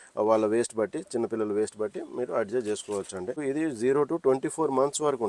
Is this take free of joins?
no; 1 cut; at 3.4 s

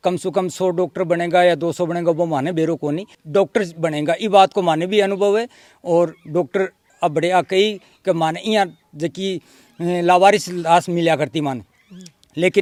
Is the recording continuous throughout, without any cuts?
yes; 0 cuts

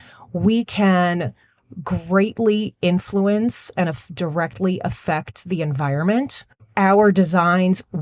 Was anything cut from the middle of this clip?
yes; 1 cut; at 6.4 s

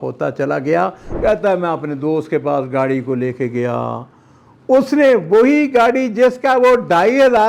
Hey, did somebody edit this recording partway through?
yes; 1 cut; at 1.0 s

